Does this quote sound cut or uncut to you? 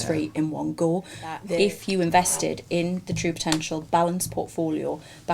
cut